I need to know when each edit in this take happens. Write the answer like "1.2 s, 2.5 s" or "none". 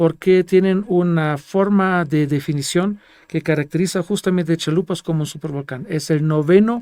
none

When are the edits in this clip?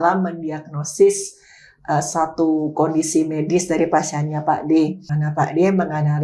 5.1 s

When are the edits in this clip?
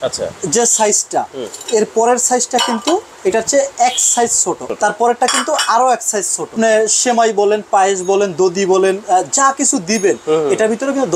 4.7 s, 6.5 s

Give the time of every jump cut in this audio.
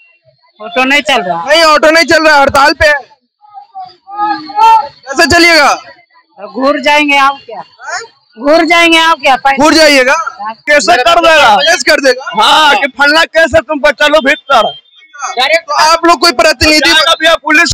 10.6 s

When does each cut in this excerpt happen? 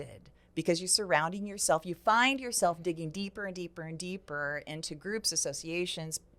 none

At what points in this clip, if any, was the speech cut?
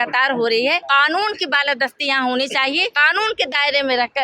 0.8 s, 3.0 s

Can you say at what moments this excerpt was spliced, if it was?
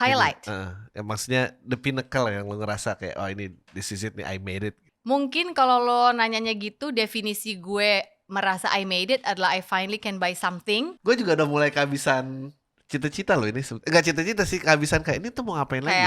4.9 s, 11.0 s

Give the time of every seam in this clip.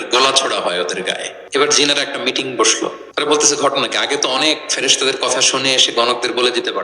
1.3 s, 3.0 s

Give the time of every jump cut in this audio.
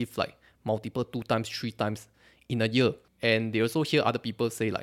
3.1 s

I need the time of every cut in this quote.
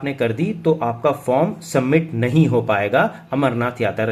none

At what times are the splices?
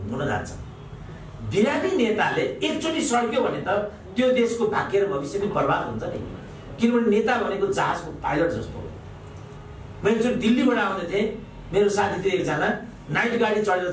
none

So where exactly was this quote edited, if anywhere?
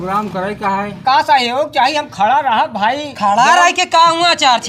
1.2 s

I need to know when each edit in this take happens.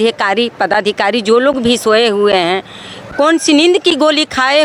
none

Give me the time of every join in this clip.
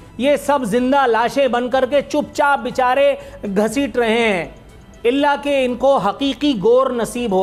none

